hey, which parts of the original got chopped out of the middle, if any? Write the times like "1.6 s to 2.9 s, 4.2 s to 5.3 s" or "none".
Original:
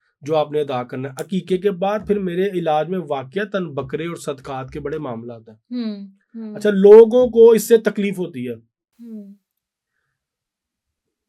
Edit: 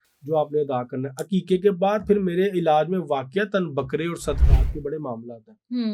none